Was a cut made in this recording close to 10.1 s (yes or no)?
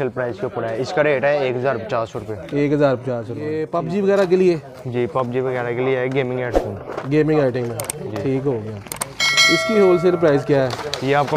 no